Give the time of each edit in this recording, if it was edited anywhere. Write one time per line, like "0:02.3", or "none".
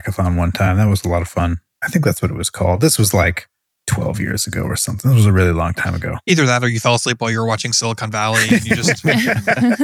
0:01.7